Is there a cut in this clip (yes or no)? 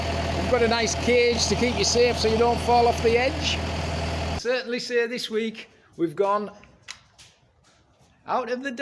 yes